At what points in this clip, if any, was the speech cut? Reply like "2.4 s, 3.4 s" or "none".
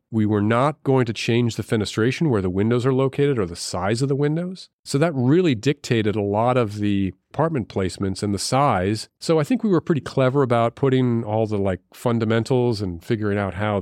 9.1 s